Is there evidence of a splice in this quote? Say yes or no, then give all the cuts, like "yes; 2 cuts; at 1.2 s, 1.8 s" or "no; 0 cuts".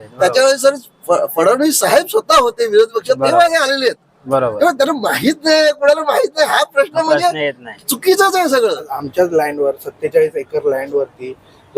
yes; 1 cut; at 8.9 s